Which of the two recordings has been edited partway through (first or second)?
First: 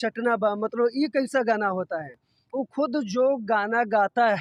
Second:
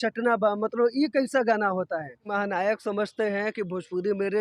second